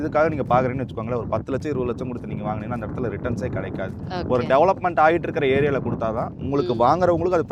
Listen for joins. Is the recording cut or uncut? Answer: uncut